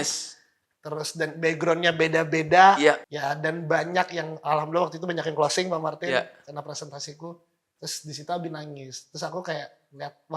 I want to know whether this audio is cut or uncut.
cut